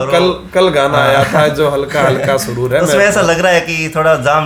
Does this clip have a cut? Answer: no; 0 cuts

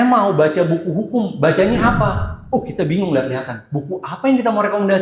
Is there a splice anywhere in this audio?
no; 0 cuts

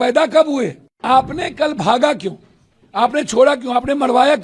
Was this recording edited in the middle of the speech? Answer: yes; 1 cut; at 1.0 s

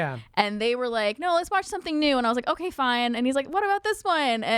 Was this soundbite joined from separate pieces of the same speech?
no; 0 cuts

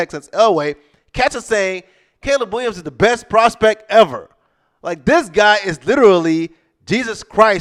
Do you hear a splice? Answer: no; 0 cuts

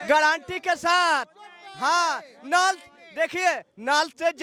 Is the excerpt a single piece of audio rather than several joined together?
yes; 0 cuts

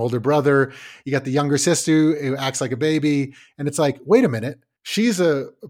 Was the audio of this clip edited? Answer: yes; 1 cut; at 0.9 s

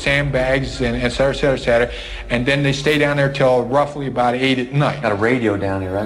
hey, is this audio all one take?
no; 1 cut; at 5.0 s

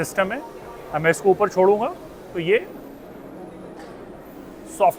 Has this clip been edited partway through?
no; 0 cuts

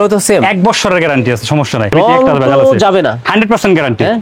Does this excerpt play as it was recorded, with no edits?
no; 1 cut; at 1.9 s

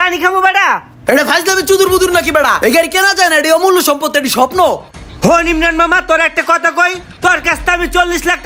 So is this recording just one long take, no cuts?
yes; 0 cuts

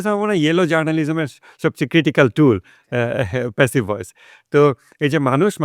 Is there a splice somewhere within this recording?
no; 0 cuts

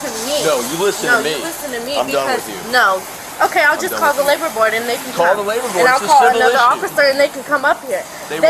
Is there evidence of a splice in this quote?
no; 0 cuts

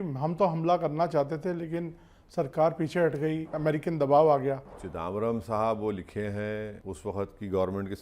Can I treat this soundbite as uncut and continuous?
no; 3 cuts; at 3.5 s, 4.8 s, 6.8 s

